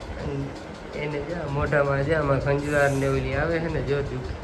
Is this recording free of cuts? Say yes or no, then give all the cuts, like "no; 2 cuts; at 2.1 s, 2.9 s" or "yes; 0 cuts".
yes; 0 cuts